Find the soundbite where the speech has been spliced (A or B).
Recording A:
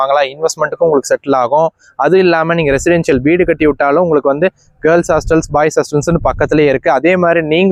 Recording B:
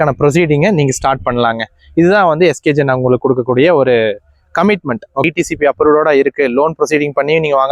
B